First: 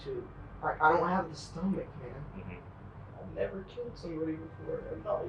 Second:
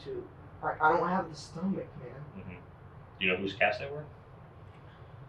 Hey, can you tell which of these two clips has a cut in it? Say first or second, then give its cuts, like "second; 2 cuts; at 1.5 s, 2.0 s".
first; 1 cut; at 3.0 s